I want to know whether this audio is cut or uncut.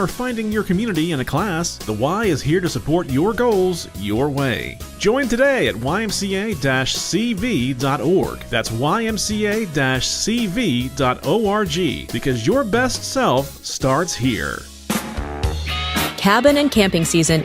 cut